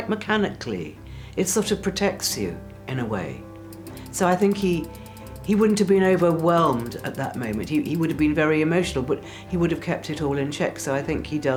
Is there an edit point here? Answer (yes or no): no